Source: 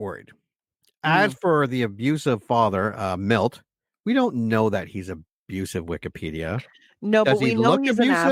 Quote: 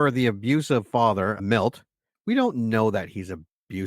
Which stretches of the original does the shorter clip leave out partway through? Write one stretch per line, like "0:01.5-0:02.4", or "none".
0:03.0-0:03.2